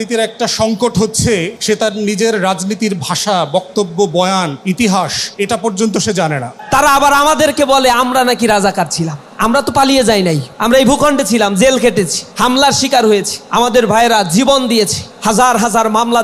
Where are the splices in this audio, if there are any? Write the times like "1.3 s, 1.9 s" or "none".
1.5 s, 4.6 s, 5.2 s, 6.5 s, 9.2 s, 10.5 s, 12.2 s, 13.4 s, 15.1 s